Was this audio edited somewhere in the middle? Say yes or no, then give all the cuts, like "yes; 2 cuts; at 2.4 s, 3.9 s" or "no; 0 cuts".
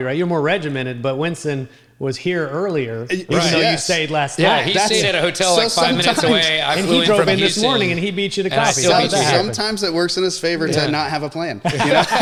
no; 0 cuts